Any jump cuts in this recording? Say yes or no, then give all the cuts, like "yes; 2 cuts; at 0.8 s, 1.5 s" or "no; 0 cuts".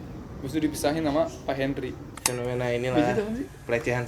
yes; 1 cut; at 2.1 s